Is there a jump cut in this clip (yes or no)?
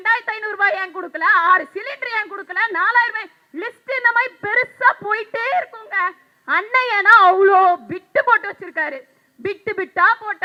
no